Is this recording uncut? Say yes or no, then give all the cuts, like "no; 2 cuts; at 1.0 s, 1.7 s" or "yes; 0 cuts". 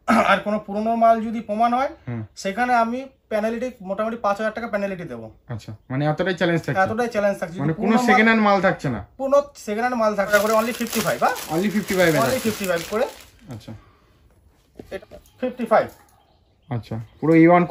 no; 2 cuts; at 10.3 s, 14.9 s